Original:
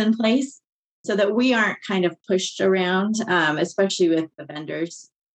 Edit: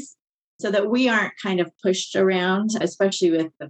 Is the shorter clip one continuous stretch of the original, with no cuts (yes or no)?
no